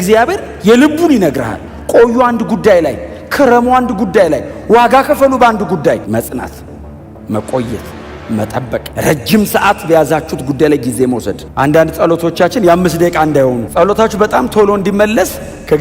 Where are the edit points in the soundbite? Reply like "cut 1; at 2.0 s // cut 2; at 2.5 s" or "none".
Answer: cut 1; at 1.6 s // cut 2; at 6.0 s // cut 3; at 8.9 s // cut 4; at 13.6 s